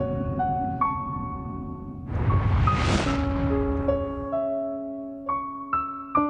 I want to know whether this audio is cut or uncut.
uncut